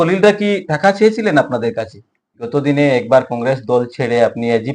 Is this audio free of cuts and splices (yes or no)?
no